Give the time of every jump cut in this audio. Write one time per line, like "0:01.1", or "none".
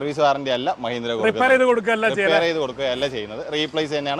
none